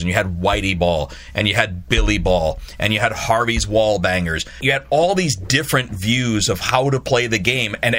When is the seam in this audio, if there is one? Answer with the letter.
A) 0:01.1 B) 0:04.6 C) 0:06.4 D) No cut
B